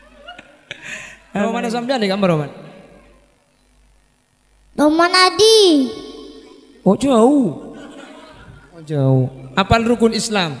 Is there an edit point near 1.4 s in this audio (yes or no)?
yes